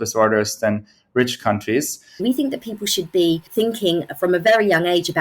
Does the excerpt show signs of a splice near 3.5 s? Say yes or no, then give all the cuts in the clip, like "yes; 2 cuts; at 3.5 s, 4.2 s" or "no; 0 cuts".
yes; 2 cuts; at 2.2 s, 3.5 s